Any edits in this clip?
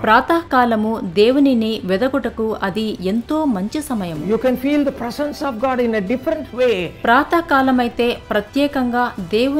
yes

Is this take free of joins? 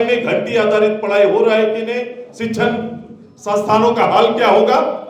yes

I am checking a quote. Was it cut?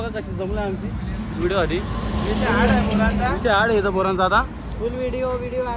no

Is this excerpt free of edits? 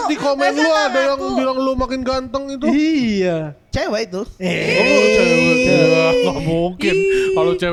yes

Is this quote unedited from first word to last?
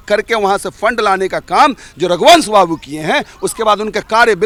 yes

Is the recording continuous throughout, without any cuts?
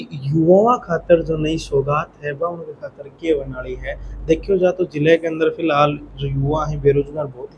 yes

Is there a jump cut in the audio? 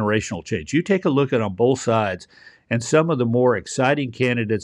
no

